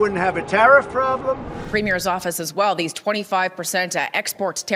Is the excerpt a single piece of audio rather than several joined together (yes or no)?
no